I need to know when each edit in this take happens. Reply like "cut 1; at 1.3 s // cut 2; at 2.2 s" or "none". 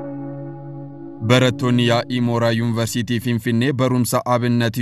cut 1; at 1.2 s